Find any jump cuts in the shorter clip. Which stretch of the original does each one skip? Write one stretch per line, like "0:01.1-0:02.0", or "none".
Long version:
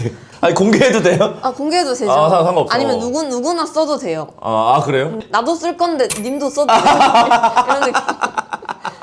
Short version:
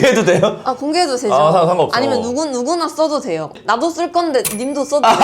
0:04.3-0:05.2